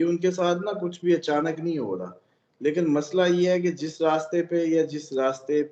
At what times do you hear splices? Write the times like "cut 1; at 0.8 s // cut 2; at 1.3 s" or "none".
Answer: none